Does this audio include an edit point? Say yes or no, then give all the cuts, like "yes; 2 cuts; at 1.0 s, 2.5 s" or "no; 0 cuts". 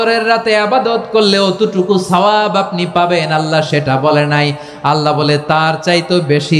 no; 0 cuts